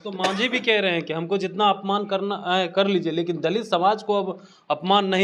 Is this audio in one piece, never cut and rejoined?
yes; 0 cuts

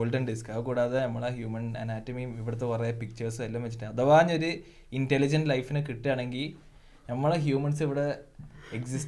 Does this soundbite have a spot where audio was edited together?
no; 0 cuts

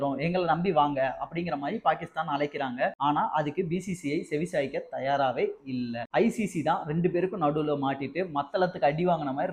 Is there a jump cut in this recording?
no; 0 cuts

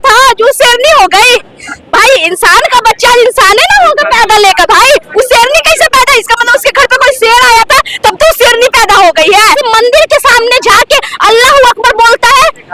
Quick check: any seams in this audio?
yes; 1 cut; at 9.6 s

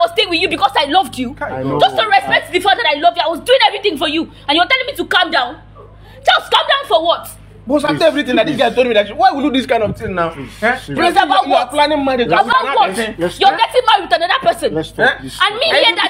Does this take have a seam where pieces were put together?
no; 0 cuts

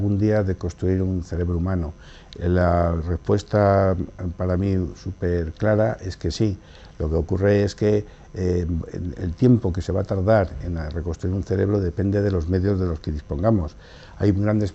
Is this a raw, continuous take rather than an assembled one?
no; 1 cut; at 4.2 s

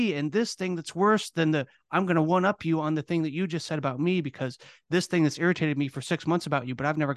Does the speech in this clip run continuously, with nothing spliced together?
yes; 0 cuts

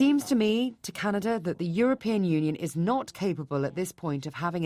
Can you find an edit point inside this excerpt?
no; 0 cuts

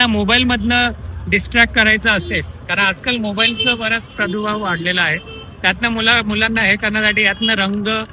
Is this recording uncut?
yes; 0 cuts

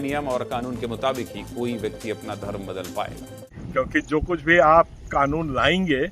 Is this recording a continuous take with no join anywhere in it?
no; 1 cut; at 3.6 s

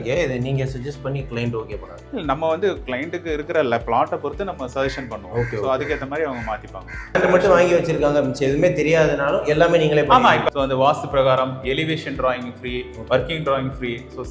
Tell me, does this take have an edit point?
yes; 3 cuts; at 1.9 s, 7.1 s, 10.4 s

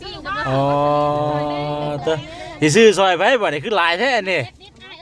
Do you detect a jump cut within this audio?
no; 0 cuts

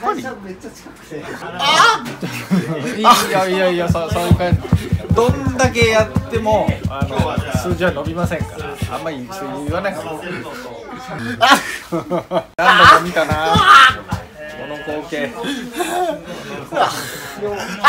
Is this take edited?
yes; 3 cuts; at 1.4 s, 11.2 s, 12.5 s

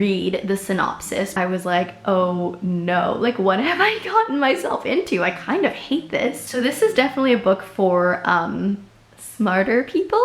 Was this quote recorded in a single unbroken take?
no; 2 cuts; at 1.3 s, 6.5 s

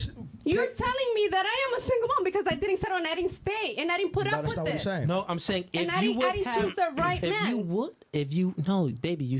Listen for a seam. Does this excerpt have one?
no; 0 cuts

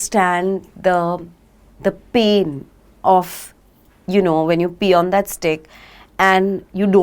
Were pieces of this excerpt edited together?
no; 0 cuts

